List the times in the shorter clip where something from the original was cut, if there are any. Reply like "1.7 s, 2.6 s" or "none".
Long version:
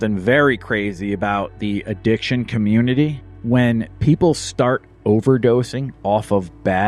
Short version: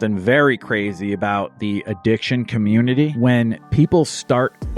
3.1 s